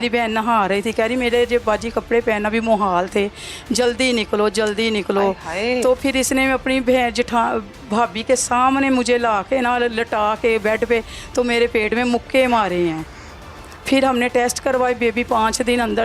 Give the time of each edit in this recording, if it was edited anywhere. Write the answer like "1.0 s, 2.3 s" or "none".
none